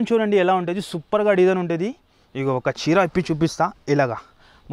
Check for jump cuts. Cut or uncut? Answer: uncut